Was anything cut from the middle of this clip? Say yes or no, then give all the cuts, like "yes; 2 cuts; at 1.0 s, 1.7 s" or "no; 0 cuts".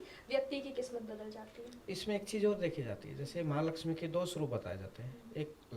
no; 0 cuts